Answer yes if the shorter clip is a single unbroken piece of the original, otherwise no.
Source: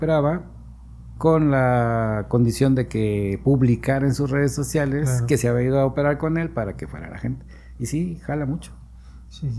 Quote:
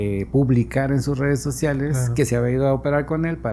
yes